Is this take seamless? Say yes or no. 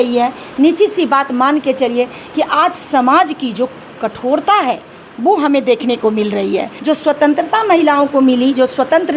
no